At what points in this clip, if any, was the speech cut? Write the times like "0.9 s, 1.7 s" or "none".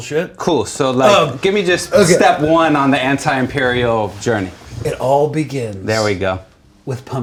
none